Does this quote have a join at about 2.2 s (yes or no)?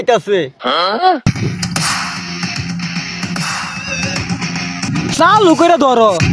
no